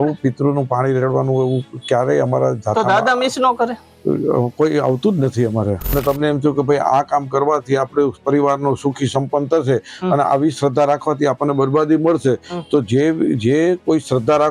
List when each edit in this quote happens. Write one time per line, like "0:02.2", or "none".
0:06.0